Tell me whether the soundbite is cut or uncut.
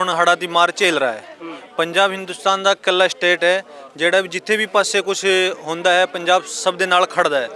uncut